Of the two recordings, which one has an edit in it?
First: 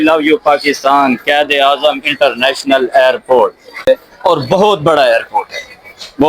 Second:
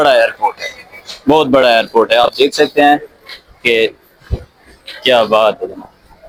first; 1 cut; at 3.9 s

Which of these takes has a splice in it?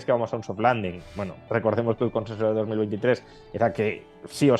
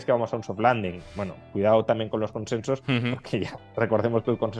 first; 1 cut; at 1.4 s

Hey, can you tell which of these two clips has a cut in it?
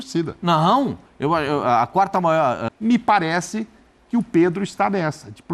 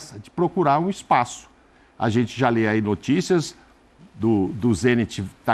first; 1 cut; at 2.7 s

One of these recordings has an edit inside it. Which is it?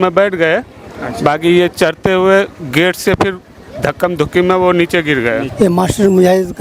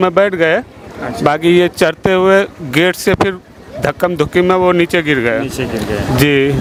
first; 1 cut; at 5.5 s

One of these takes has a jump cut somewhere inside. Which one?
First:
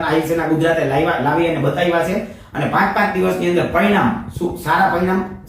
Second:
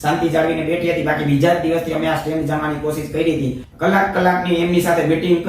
second; 1 cut; at 3.6 s

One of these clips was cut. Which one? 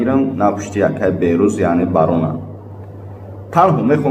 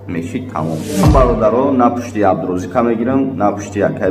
second; 1 cut; at 1.0 s

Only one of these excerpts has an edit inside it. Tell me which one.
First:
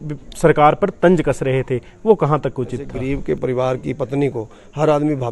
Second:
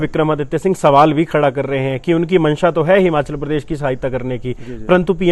first; 1 cut; at 3.0 s

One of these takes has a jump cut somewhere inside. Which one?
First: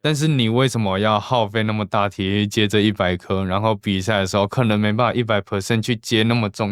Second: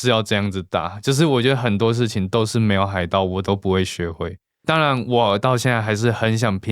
second; 1 cut; at 4.6 s

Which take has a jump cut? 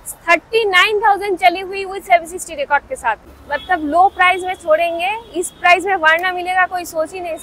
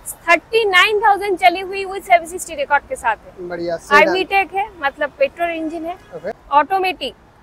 first; 1 cut; at 3.3 s

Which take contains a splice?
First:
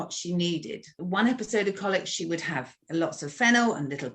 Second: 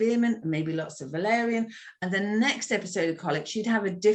first; 2 cuts; at 1.0 s, 2.7 s

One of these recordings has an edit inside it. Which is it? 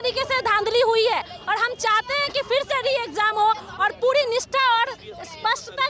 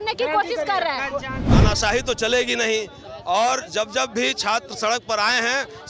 second; 1 cut; at 1.4 s

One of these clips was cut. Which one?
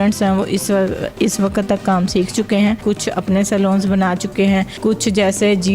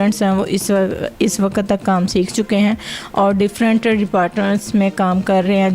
first; 2 cuts; at 2.8 s, 4.7 s

